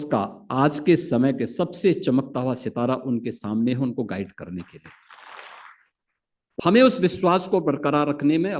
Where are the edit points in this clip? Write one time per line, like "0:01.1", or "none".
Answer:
0:06.6